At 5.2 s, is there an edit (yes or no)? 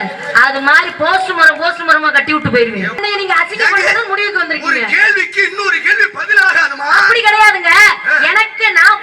no